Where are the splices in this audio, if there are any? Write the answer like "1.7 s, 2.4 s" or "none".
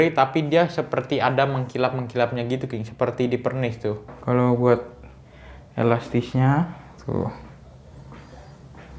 4.1 s